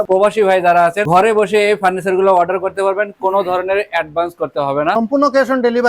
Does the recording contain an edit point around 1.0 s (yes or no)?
yes